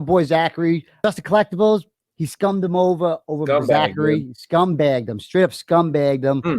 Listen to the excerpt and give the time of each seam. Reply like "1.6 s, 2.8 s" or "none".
1.0 s